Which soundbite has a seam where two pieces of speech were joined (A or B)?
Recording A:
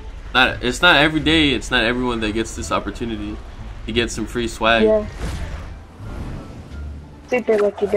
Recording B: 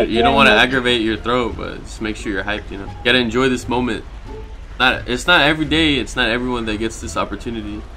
B